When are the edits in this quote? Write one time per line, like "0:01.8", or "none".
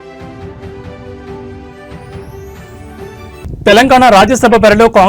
0:03.4